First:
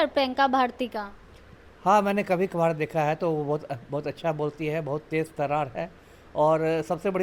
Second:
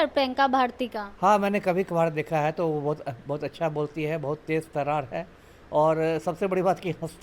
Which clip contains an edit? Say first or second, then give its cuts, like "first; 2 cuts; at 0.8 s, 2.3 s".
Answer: second; 1 cut; at 1.0 s